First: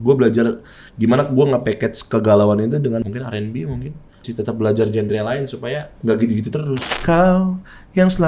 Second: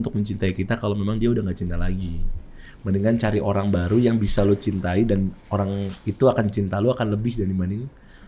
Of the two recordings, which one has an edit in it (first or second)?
first